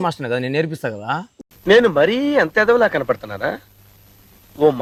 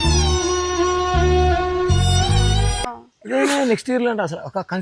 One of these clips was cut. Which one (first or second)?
second